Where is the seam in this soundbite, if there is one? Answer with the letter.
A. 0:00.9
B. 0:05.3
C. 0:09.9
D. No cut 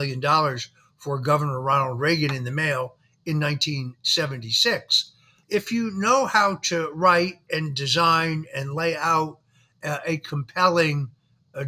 B